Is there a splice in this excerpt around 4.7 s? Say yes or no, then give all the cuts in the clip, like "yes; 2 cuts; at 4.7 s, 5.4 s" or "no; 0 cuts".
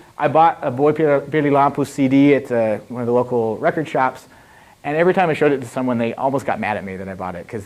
yes; 1 cut; at 4.7 s